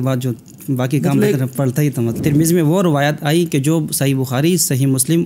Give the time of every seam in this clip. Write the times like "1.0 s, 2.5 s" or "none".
2.1 s